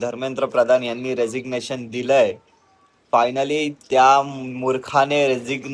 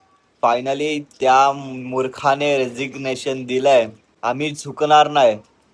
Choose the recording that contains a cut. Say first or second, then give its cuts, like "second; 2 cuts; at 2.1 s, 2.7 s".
second; 1 cut; at 4.0 s